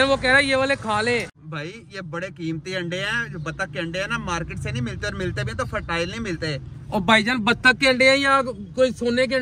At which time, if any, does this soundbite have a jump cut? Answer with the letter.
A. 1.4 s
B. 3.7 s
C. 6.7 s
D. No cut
A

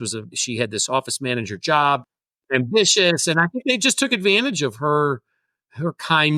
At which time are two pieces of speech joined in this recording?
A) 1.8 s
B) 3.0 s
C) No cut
A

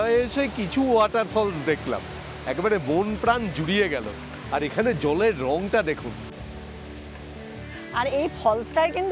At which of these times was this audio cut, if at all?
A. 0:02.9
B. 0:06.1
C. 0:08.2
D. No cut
D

